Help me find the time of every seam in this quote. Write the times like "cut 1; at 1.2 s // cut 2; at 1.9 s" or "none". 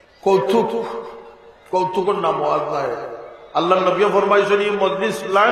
none